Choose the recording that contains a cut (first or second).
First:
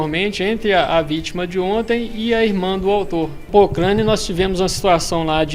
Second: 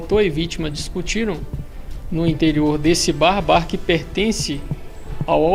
first